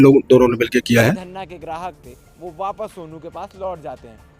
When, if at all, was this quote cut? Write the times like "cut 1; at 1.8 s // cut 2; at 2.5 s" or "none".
cut 1; at 1.2 s